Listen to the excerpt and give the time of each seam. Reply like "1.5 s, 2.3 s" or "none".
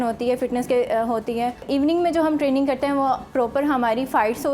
1.6 s